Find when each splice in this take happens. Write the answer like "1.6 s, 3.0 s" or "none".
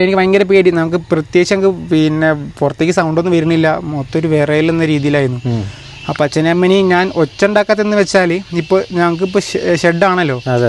none

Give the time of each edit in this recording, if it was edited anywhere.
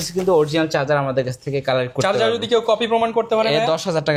none

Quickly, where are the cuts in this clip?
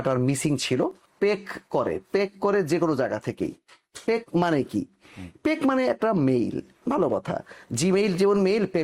1.0 s

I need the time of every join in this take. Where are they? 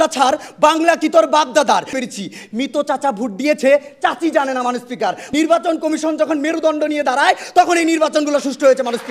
1.9 s, 5.2 s

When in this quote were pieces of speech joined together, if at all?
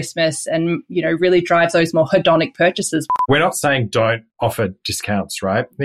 3.1 s, 4.3 s

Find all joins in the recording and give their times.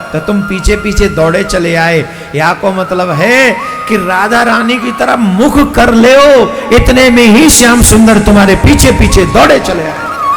none

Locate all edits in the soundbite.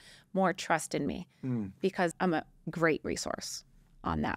2.1 s

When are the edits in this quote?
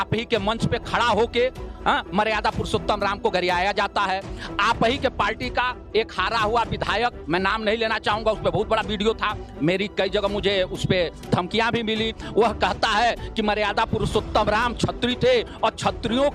none

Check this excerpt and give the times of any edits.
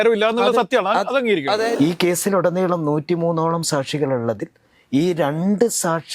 1.7 s

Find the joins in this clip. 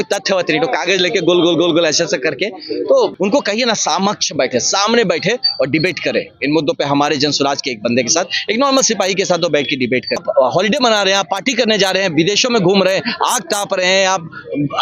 3.1 s, 10.2 s

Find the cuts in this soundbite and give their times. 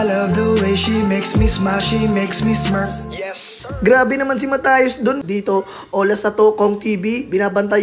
5.2 s

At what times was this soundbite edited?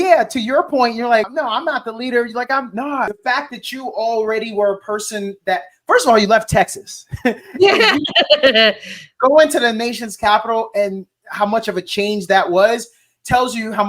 1.3 s, 3.1 s

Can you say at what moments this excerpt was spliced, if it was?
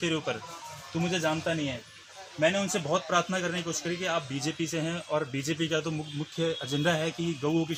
none

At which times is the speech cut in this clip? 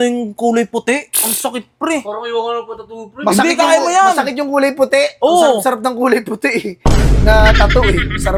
none

